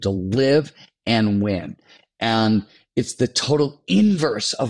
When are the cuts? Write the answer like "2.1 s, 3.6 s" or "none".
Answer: none